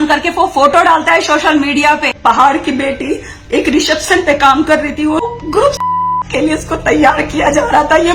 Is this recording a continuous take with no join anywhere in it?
no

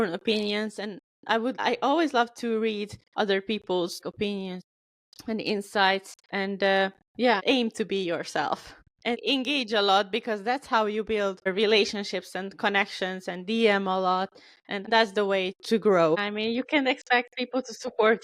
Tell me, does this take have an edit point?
yes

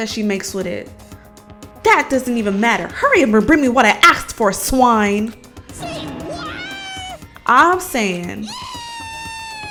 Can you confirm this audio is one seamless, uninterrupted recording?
yes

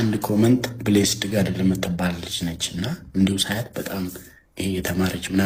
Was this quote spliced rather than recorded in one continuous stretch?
no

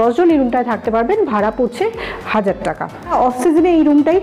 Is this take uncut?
no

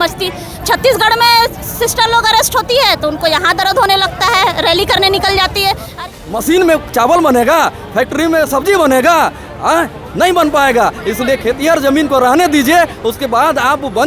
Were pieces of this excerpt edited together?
yes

